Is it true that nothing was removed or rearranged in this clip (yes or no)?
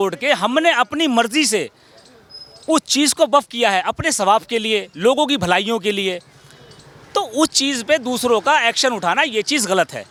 yes